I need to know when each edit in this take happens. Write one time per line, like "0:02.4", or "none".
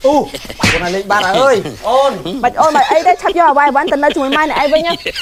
none